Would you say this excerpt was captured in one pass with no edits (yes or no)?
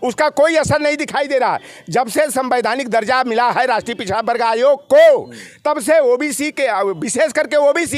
yes